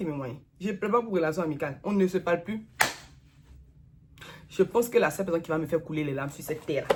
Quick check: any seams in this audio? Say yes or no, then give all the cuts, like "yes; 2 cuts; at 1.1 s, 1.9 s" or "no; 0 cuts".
no; 0 cuts